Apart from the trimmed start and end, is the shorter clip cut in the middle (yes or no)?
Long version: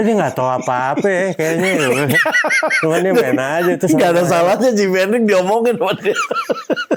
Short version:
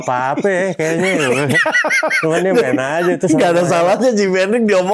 no